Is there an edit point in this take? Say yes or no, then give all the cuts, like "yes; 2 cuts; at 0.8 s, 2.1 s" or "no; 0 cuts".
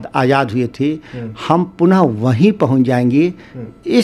no; 0 cuts